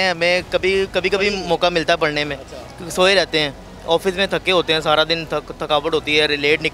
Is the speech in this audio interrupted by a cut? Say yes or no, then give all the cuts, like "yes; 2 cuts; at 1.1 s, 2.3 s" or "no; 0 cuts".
no; 0 cuts